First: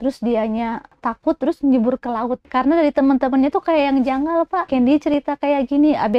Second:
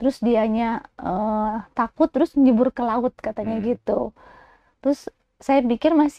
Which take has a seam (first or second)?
first